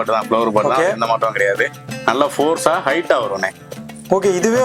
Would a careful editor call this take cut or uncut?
uncut